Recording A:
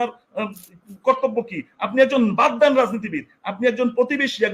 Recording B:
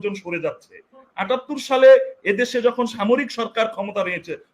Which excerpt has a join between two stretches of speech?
B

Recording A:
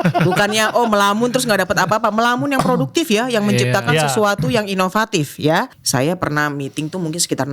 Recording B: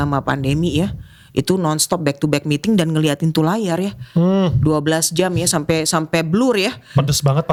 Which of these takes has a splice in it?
A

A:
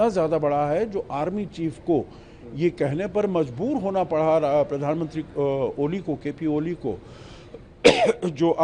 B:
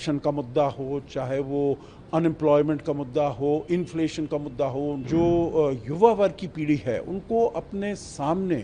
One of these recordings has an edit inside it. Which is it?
B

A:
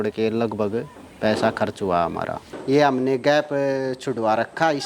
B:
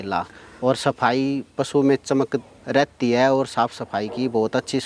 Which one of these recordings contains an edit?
A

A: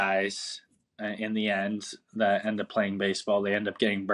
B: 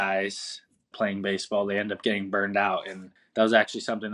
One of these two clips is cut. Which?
B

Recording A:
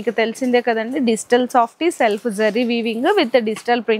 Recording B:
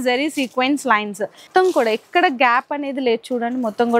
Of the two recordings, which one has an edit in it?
B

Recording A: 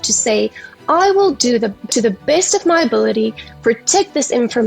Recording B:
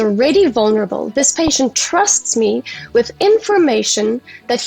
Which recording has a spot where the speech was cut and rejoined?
A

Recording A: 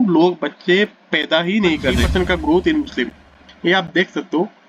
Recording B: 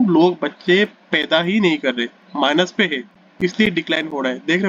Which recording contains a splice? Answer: A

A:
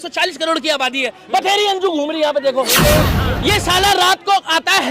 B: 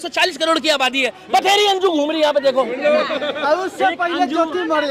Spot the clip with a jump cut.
A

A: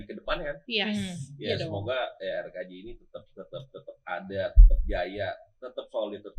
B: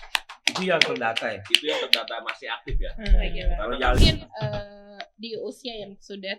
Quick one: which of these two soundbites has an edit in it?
B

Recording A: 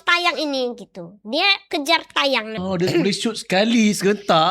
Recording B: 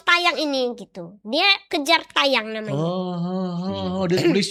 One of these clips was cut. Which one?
A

